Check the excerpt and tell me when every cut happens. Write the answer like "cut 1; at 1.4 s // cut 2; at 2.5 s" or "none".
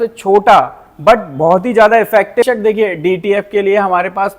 cut 1; at 2.4 s